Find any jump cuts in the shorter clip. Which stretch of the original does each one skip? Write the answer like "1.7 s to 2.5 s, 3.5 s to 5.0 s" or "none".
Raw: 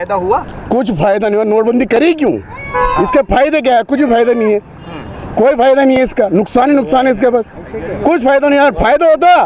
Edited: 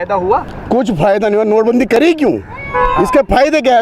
none